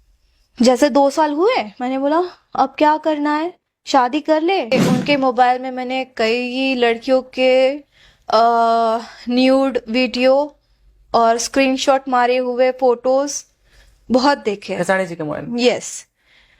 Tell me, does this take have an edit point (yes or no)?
yes